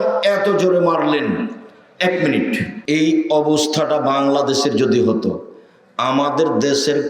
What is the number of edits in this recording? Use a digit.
1